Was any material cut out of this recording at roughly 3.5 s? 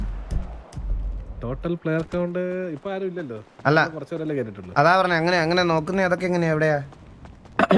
no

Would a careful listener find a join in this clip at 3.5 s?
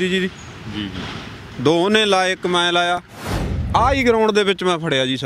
yes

